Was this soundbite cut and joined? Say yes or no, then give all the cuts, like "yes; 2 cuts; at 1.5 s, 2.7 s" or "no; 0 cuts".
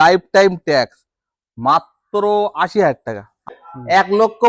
yes; 1 cut; at 3.6 s